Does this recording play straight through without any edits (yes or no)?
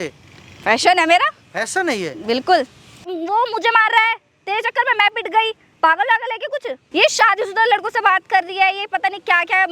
no